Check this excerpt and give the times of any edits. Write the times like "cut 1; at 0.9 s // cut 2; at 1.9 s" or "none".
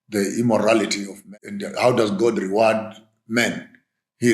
cut 1; at 1.1 s